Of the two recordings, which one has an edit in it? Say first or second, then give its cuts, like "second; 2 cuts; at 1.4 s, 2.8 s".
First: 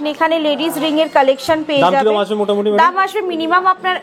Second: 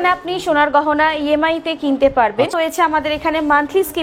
second; 1 cut; at 2.5 s